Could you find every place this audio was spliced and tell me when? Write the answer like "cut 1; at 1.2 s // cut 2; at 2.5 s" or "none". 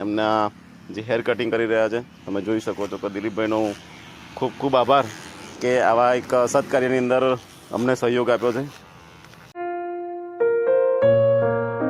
cut 1; at 9.6 s